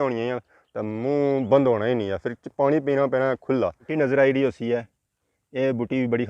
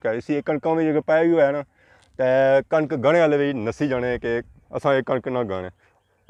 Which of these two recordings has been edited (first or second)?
first